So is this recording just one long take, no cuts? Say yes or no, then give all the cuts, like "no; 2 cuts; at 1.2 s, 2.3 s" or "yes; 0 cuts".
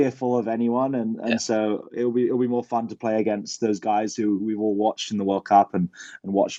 yes; 0 cuts